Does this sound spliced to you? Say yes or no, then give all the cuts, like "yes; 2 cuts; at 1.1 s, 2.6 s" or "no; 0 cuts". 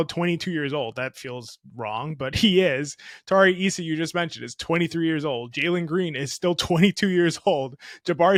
no; 0 cuts